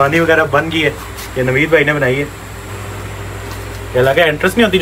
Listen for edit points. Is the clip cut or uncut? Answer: cut